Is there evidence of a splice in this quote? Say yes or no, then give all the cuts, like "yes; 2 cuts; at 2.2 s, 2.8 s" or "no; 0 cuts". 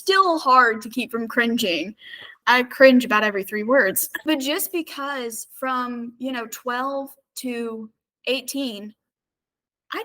yes; 2 cuts; at 2.4 s, 4.1 s